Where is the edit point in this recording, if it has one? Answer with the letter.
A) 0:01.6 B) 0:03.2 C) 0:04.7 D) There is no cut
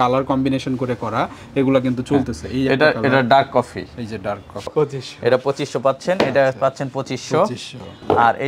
C